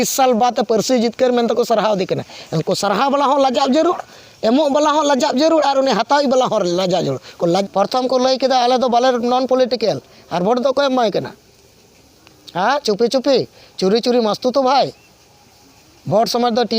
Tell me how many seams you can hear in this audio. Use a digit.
1